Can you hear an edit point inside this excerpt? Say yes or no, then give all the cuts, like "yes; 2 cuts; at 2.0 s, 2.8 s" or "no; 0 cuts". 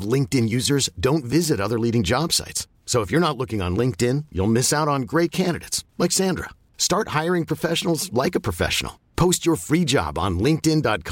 no; 0 cuts